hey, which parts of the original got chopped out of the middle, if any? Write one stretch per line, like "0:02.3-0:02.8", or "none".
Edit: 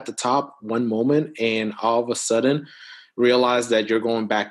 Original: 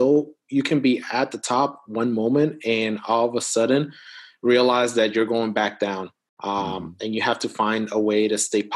none